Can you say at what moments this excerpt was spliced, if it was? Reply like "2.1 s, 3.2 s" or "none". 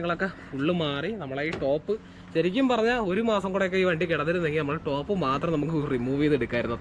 none